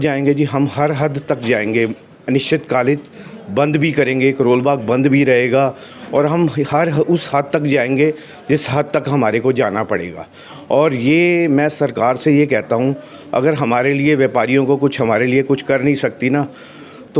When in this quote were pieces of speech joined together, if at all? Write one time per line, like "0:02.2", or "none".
none